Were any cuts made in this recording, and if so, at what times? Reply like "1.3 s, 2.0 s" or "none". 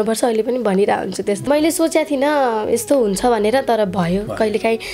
1.5 s